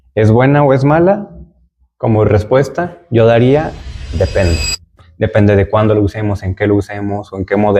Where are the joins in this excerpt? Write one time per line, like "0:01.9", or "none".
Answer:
0:05.0